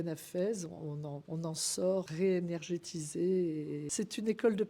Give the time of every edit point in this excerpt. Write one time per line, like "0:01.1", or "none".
0:01.2
0:02.1
0:03.9